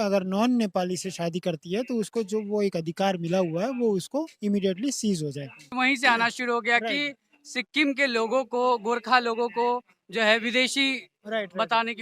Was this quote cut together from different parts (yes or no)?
yes